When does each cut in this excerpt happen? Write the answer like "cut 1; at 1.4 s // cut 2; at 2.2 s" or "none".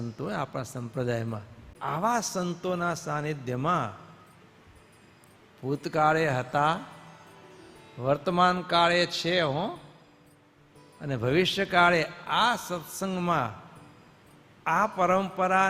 cut 1; at 1.7 s